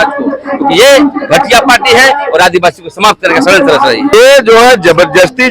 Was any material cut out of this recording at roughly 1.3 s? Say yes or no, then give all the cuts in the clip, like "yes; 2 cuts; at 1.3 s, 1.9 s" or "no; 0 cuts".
no; 1 cut; at 4.1 s